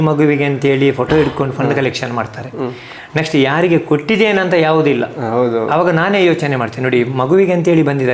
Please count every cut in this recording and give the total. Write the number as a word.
zero